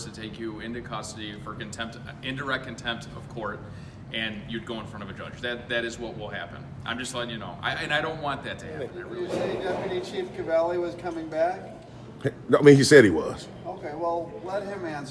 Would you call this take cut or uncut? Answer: cut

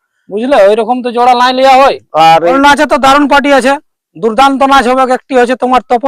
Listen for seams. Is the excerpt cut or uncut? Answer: cut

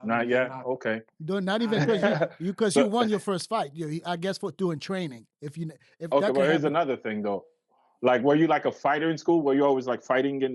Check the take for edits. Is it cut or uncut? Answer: uncut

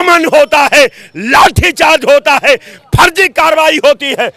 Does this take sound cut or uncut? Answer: uncut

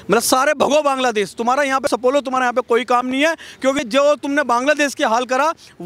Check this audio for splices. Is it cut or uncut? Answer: cut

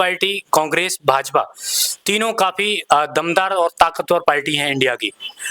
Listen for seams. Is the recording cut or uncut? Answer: uncut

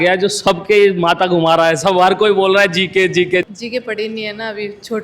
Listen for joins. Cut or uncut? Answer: cut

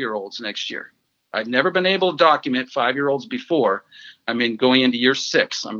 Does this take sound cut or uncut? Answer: uncut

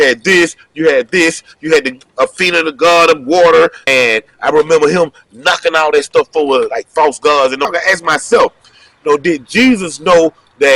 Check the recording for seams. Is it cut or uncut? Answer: cut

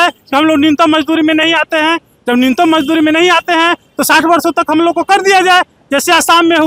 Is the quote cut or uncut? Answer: uncut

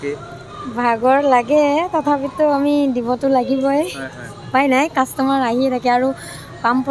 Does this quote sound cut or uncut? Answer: uncut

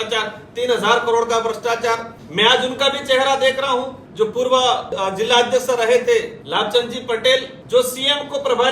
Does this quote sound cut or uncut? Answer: cut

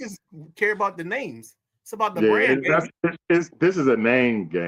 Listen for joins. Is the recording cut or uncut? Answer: uncut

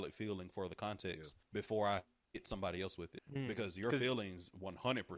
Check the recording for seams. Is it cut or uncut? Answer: cut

